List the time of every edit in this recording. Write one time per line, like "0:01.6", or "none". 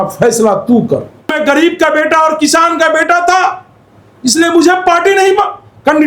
0:01.3